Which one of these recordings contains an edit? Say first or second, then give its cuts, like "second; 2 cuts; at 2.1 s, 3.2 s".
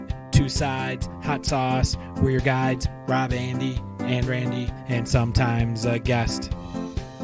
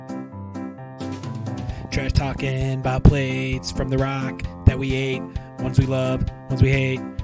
second; 1 cut; at 1.0 s